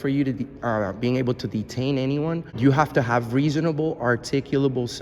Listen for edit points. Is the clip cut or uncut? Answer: cut